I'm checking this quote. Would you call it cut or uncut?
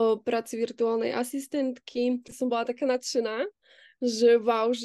cut